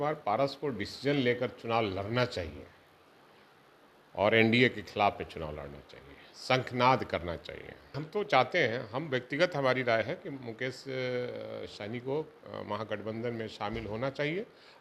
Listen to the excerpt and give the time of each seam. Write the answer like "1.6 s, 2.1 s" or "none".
8.0 s